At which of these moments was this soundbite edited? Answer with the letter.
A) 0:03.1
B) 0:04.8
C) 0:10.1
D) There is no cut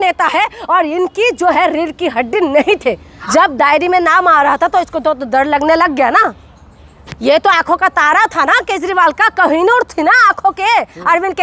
A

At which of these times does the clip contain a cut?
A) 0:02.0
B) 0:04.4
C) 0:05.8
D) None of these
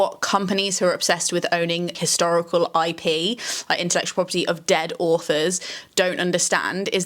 A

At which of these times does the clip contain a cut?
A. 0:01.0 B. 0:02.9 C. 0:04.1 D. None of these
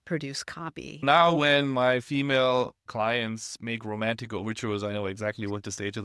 A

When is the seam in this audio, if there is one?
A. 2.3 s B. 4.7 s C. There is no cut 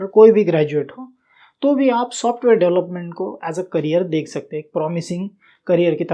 C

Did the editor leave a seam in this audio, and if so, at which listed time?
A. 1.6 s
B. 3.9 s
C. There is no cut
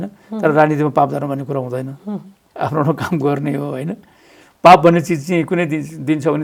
C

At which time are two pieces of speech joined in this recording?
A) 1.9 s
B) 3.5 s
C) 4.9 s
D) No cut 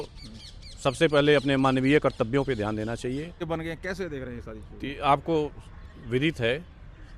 B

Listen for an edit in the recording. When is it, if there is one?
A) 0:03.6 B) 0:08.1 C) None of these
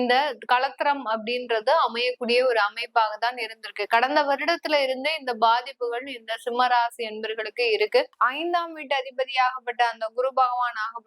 B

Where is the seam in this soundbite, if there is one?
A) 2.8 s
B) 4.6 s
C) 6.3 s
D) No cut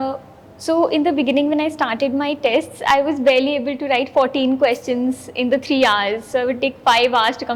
D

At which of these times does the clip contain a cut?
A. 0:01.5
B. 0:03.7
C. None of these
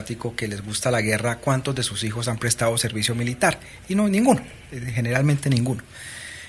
C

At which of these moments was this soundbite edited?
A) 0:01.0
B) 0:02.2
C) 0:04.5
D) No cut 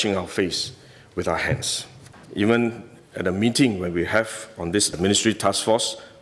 B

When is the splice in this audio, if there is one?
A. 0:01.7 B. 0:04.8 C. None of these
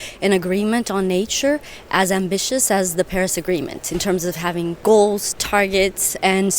B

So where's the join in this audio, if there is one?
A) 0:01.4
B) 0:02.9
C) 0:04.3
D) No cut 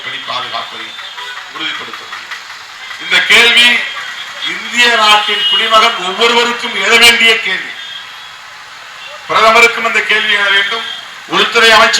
D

